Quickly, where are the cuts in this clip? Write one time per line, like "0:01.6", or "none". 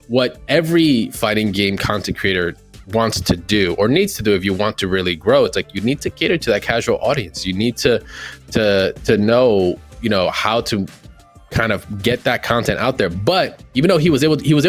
none